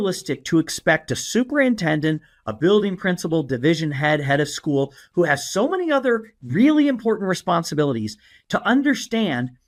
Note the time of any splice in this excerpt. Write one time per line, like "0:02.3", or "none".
none